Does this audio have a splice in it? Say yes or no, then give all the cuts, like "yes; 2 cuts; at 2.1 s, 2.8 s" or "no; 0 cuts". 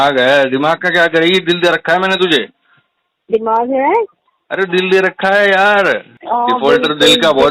yes; 1 cut; at 6.1 s